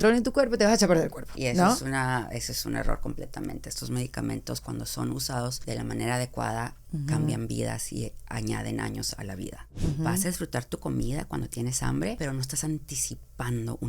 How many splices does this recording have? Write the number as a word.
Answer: four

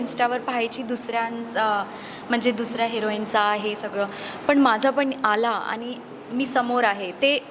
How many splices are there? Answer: zero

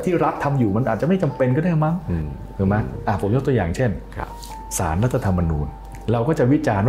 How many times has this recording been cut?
one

